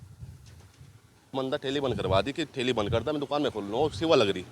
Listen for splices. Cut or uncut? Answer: cut